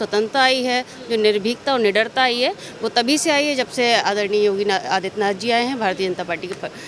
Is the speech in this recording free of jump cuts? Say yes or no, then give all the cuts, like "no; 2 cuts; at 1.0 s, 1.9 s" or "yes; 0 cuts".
yes; 0 cuts